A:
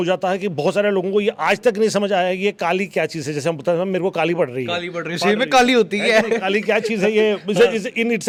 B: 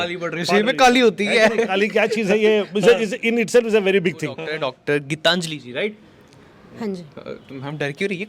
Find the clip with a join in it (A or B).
B